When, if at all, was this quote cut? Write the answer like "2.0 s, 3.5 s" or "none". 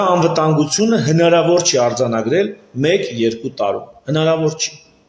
none